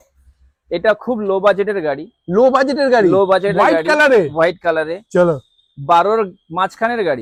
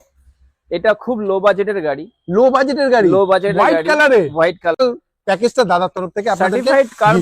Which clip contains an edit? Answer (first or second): second